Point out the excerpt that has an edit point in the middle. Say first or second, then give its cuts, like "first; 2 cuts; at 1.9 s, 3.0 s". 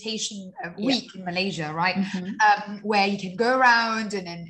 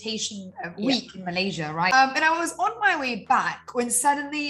second; 1 cut; at 1.9 s